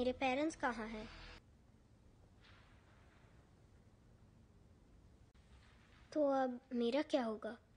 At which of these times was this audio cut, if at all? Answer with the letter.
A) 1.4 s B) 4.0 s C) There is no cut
A